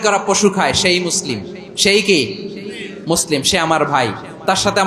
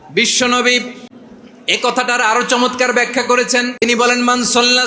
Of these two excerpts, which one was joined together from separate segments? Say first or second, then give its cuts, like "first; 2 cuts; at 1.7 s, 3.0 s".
second; 2 cuts; at 1.0 s, 3.8 s